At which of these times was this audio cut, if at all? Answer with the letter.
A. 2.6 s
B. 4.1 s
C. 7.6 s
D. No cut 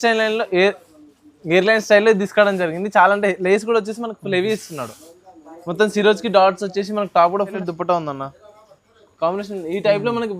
C